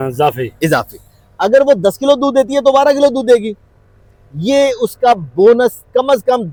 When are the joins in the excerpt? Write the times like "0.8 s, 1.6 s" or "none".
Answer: none